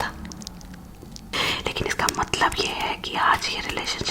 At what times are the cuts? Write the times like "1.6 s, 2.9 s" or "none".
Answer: 1.3 s